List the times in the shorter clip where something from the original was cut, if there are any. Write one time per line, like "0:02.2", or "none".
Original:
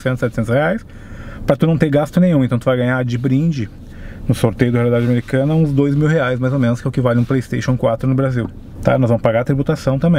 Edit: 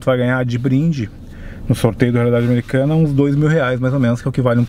none